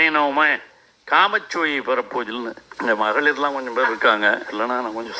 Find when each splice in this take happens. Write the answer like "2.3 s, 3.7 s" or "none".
2.6 s